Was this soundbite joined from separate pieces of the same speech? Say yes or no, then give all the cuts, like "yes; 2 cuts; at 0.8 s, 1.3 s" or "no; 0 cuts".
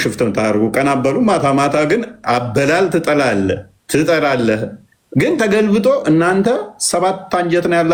no; 0 cuts